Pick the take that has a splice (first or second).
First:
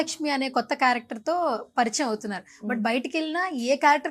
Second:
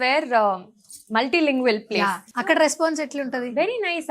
second